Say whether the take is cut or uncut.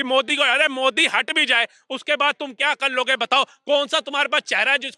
uncut